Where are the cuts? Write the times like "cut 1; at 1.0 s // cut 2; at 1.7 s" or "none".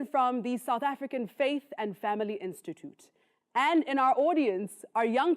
cut 1; at 2.4 s